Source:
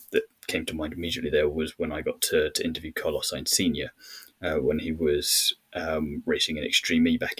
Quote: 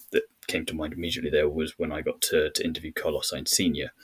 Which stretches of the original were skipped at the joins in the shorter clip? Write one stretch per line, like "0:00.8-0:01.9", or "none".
none